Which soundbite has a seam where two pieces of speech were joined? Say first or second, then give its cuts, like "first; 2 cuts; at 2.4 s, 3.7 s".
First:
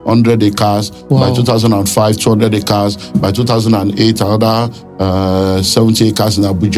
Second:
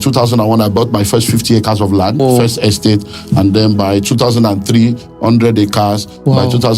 second; 1 cut; at 2.2 s